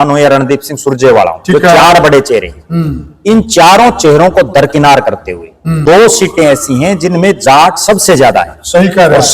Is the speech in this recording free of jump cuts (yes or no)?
no